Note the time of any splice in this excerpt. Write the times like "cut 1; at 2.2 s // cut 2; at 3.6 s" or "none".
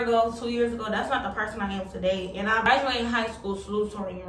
cut 1; at 2.6 s

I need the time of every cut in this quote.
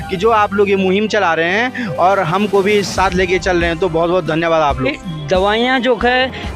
cut 1; at 4.9 s

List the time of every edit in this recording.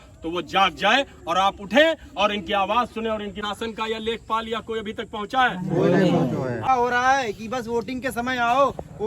cut 1; at 3.4 s // cut 2; at 6.7 s

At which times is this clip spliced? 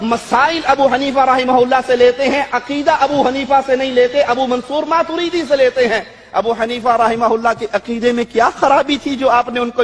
none

